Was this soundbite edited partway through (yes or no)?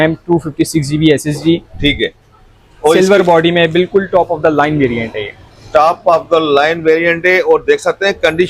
no